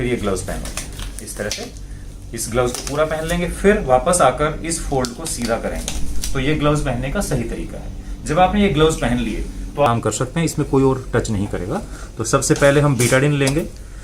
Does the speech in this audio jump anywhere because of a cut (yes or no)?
yes